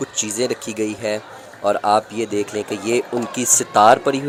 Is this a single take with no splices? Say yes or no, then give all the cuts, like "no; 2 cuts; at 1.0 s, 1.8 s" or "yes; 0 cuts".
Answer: yes; 0 cuts